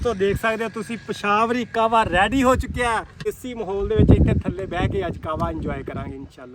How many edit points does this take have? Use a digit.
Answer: 1